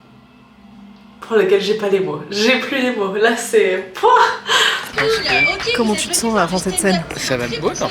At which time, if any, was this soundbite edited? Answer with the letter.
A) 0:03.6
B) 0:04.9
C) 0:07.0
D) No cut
B